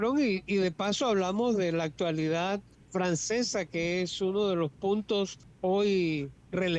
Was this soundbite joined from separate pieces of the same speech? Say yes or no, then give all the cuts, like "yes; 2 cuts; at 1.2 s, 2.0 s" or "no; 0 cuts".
yes; 2 cuts; at 2.8 s, 5.4 s